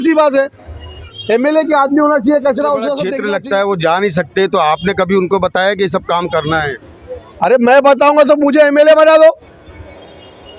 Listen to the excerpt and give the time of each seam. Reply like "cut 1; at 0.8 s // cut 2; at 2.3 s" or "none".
cut 1; at 3.1 s